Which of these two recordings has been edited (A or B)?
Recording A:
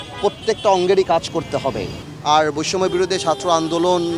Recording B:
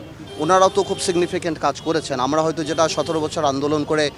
A